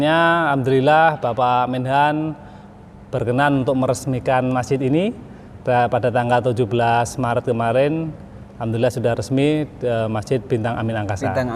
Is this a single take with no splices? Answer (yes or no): yes